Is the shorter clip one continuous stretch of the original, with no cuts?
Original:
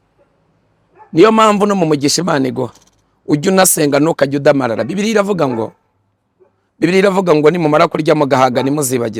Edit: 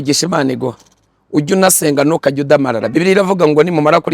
no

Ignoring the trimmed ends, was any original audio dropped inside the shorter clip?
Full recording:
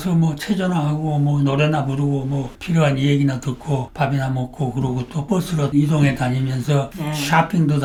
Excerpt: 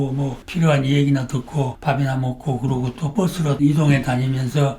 no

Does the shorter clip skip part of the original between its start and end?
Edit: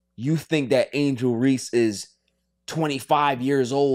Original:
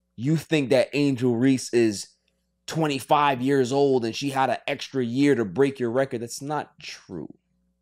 no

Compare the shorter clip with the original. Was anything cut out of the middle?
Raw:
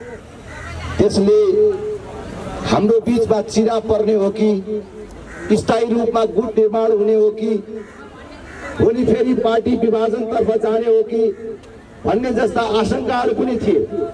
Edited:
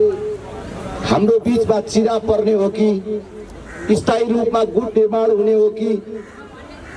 no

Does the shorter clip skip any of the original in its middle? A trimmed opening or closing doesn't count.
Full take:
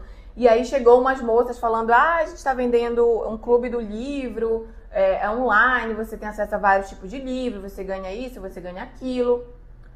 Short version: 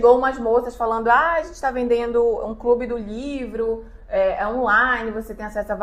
no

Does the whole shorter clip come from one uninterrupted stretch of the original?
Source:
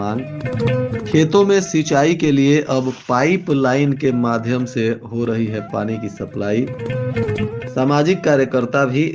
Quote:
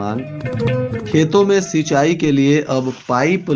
yes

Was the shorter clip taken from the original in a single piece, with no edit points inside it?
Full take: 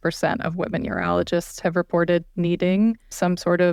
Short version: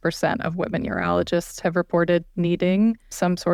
yes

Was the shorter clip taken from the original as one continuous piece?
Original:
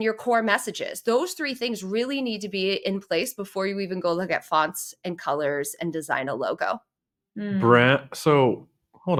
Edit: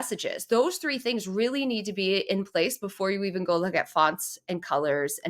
yes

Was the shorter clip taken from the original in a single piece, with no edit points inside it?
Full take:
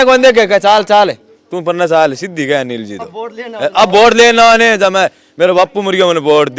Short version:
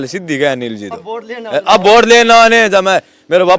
yes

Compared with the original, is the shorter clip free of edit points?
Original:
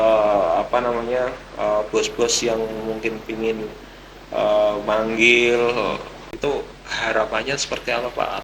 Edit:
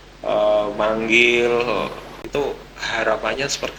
yes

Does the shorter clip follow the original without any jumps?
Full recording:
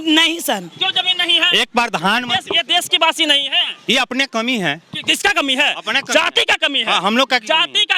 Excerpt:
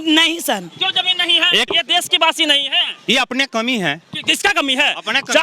no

